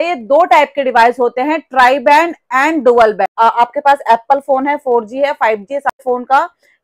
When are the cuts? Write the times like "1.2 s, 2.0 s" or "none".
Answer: 3.3 s, 5.9 s